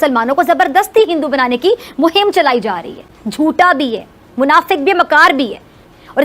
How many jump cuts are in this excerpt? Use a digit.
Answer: 1